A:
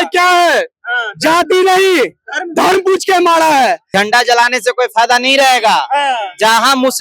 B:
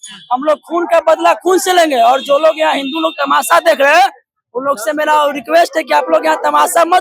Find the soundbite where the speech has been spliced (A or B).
A